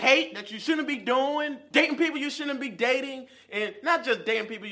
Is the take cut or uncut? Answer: cut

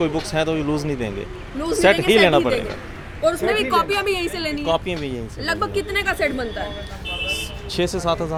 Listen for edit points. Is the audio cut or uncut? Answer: uncut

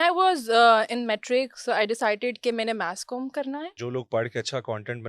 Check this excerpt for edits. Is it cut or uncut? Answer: cut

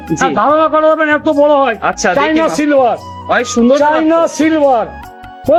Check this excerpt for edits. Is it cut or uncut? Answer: uncut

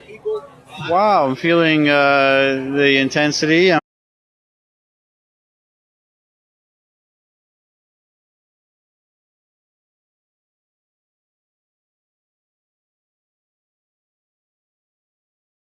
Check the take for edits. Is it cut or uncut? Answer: uncut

